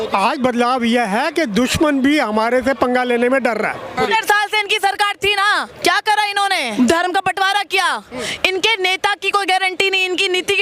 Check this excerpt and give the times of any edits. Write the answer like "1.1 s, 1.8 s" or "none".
4.0 s, 5.7 s, 6.7 s